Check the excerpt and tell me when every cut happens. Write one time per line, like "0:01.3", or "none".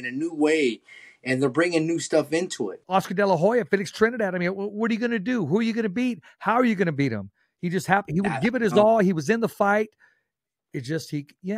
0:02.7